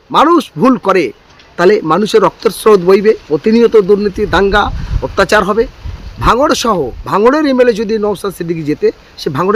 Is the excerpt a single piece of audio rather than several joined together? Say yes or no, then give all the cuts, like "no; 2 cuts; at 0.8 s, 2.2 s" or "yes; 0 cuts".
yes; 0 cuts